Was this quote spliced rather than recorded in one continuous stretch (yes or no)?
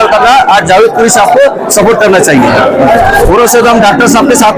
yes